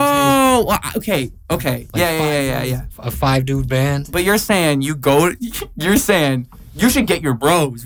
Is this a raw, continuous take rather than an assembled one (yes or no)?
yes